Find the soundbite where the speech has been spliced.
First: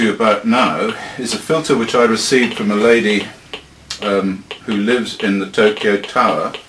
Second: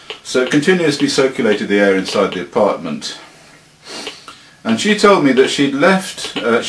second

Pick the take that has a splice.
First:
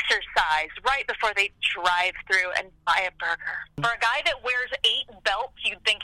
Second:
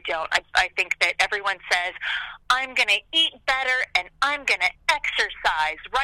first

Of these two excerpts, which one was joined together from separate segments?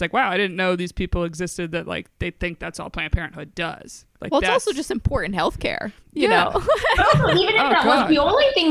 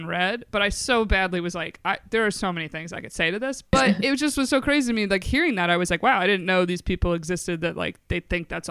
second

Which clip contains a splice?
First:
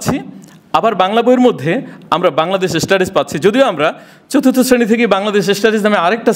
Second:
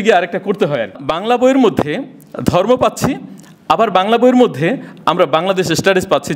second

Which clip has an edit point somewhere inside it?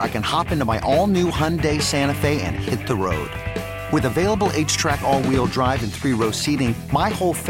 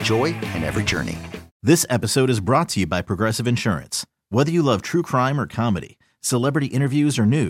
second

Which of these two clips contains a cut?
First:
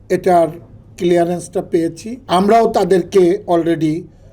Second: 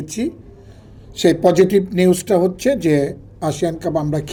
first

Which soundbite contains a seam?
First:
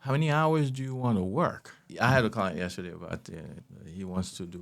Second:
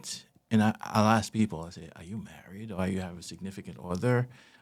first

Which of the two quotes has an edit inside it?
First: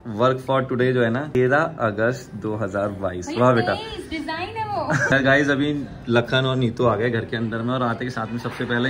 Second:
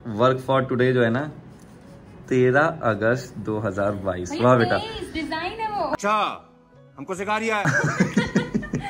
first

